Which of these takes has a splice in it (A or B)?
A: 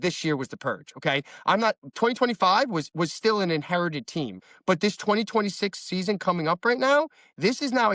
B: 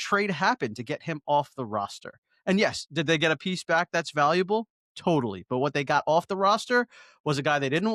A